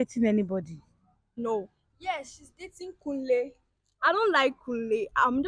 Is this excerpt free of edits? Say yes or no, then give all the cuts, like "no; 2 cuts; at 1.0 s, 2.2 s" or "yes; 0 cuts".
yes; 0 cuts